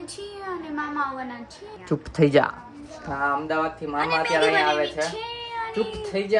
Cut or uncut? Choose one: cut